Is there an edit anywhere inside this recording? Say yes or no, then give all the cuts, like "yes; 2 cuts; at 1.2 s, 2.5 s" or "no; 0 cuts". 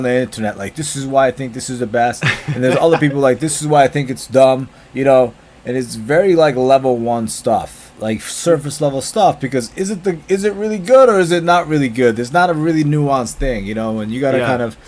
no; 0 cuts